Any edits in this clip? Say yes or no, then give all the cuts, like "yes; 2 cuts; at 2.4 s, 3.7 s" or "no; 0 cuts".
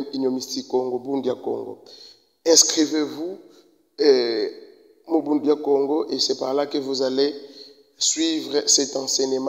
no; 0 cuts